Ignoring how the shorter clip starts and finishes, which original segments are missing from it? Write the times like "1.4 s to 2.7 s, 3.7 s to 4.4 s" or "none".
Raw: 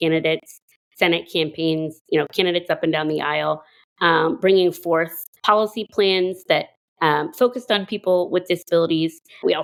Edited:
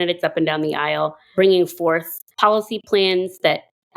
3.8 s to 4.4 s